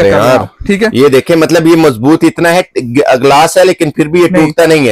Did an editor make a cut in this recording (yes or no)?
no